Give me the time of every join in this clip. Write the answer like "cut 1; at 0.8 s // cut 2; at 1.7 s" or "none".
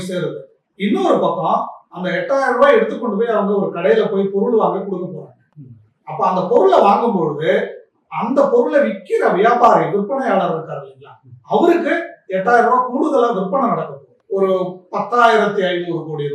cut 1; at 14.1 s